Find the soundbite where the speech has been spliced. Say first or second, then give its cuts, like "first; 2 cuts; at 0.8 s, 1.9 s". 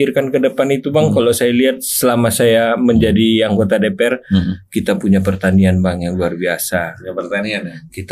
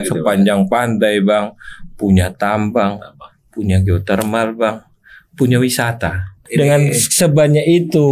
second; 1 cut; at 6.4 s